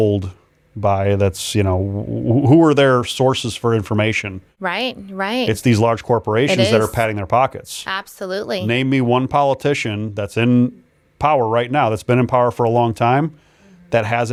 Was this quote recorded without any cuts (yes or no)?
yes